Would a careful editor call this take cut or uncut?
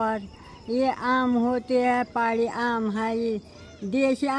uncut